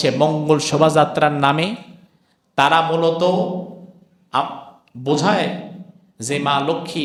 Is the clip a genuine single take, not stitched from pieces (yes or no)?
yes